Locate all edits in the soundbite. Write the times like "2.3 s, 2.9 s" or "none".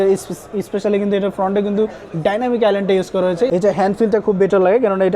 3.5 s